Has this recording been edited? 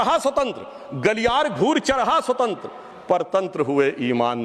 no; 0 cuts

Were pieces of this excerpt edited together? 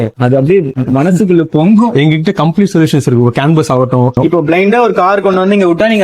yes; 1 cut; at 4.2 s

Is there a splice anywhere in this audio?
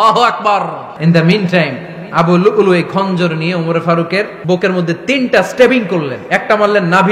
yes; 2 cuts; at 0.9 s, 4.4 s

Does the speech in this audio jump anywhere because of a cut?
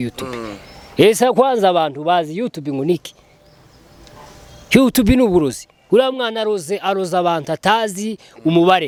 no; 0 cuts

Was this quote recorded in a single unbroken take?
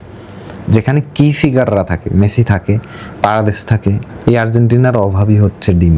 no; 1 cut; at 4.1 s

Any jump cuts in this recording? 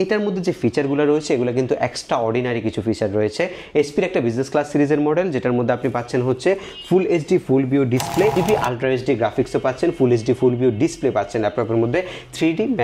yes; 1 cut; at 8.3 s

